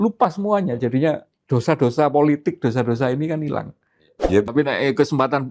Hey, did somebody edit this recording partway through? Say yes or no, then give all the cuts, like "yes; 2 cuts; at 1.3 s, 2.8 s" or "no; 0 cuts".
yes; 2 cuts; at 1.3 s, 4.5 s